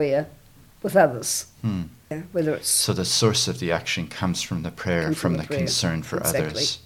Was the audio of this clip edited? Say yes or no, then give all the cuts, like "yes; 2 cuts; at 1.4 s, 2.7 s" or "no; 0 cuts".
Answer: no; 0 cuts